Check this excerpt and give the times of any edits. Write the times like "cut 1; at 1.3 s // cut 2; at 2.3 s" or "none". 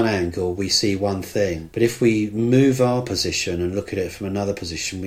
cut 1; at 1.6 s